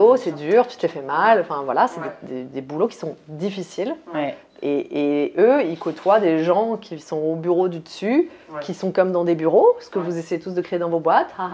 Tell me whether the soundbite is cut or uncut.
uncut